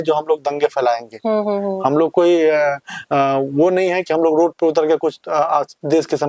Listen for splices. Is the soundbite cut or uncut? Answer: uncut